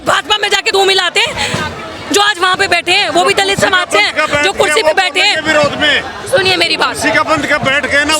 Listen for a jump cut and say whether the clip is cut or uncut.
uncut